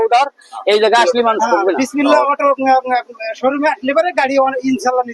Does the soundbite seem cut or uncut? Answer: cut